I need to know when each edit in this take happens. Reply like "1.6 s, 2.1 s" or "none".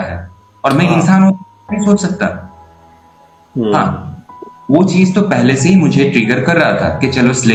none